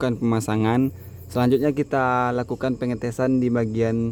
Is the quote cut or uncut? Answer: uncut